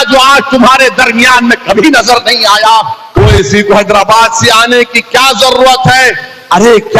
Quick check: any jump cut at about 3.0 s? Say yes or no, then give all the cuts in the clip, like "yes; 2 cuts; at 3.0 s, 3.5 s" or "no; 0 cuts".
yes; 1 cut; at 3.0 s